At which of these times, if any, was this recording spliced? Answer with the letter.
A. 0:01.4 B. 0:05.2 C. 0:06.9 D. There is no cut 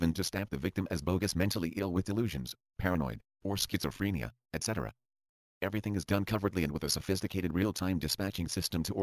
C